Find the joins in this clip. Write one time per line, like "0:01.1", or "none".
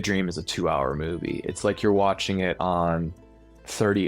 none

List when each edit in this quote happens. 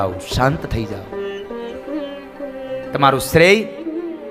none

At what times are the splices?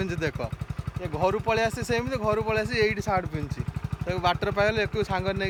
none

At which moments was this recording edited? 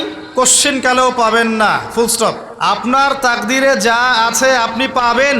0:02.8

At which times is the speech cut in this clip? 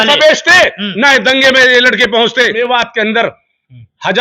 0:02.5

